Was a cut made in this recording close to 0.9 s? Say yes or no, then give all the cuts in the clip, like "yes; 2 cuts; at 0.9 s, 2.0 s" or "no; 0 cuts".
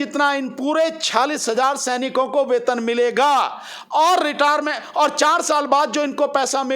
yes; 1 cut; at 0.9 s